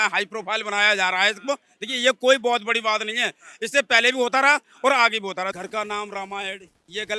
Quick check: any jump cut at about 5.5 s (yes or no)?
yes